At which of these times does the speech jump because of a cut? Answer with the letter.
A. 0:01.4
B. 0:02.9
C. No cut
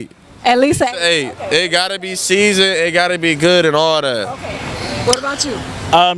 C